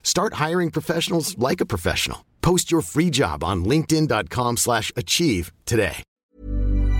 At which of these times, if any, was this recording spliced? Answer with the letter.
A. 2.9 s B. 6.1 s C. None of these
B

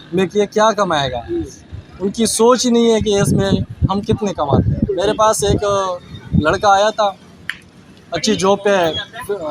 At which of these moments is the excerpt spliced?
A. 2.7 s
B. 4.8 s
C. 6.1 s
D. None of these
B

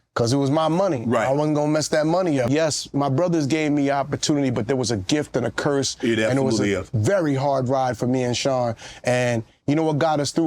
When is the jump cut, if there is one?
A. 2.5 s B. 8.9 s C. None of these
A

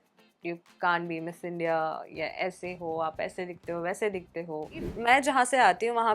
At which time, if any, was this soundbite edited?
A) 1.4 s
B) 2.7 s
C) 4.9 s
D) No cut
C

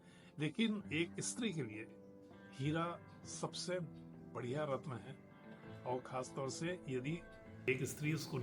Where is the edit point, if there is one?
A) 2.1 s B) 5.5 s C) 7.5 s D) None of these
C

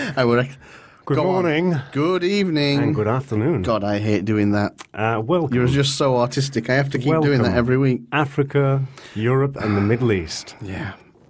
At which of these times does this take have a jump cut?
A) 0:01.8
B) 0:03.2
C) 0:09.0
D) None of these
A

